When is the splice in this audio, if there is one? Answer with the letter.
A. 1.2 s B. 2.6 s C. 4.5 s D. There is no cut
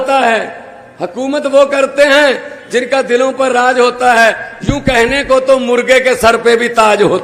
D